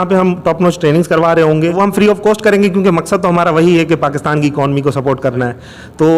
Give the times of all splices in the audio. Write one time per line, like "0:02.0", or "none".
0:01.8